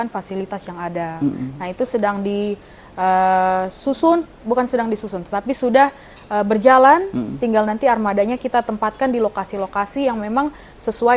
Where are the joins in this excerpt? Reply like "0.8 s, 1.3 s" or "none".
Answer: none